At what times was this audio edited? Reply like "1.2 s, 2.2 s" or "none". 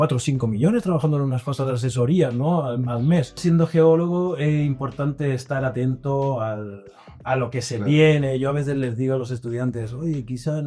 3.4 s

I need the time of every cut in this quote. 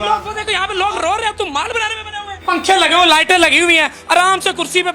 2.4 s

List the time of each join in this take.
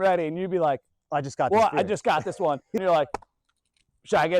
2.8 s

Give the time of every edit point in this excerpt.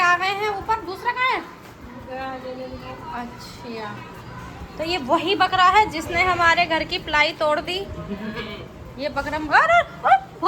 none

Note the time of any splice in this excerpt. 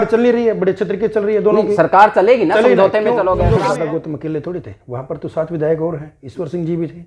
3.6 s

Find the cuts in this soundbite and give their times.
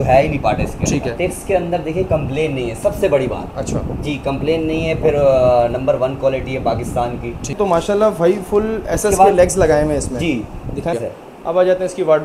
1.2 s, 7.5 s, 10.9 s

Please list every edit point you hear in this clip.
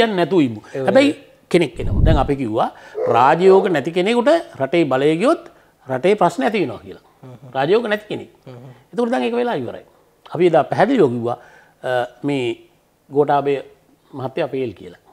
1.9 s

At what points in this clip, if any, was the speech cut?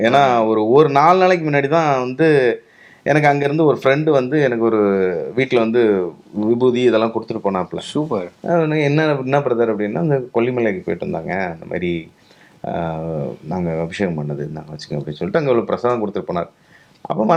none

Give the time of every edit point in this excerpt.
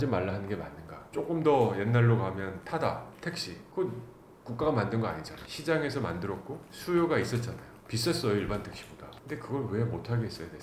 none

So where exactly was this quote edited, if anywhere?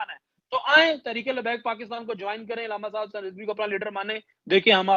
none

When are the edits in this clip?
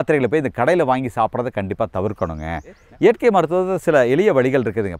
2.8 s

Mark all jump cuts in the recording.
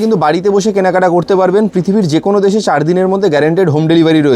none

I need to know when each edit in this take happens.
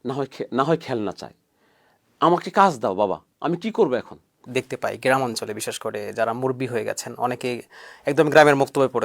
4.4 s

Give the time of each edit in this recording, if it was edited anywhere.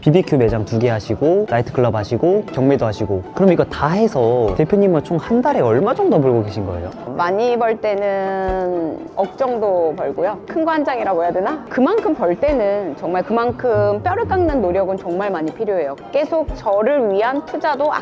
2.5 s, 11.6 s, 16.0 s

